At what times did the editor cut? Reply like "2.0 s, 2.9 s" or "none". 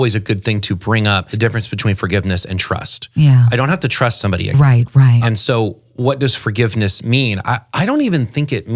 1.3 s, 5.2 s